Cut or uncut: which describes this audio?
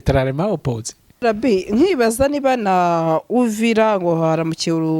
cut